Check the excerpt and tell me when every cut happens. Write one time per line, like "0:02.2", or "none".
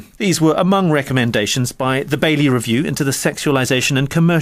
none